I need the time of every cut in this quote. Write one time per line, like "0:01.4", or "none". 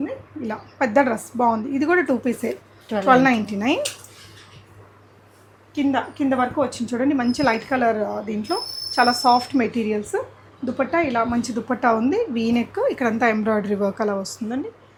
none

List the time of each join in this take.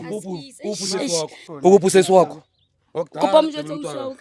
0:01.4

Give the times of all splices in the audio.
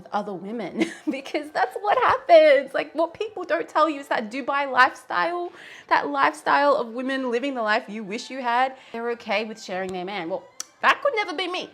0:08.9

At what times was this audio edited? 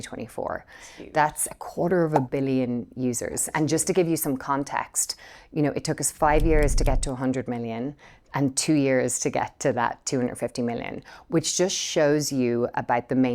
none

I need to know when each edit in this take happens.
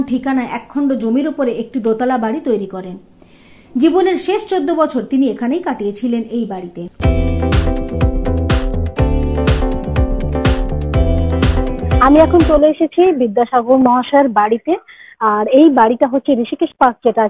none

